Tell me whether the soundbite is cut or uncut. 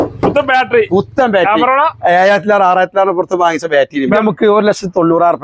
cut